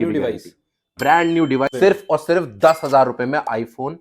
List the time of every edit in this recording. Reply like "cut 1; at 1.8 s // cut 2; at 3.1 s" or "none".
cut 1; at 1.7 s